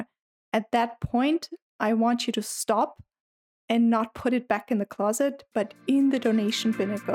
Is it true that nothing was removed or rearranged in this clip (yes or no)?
yes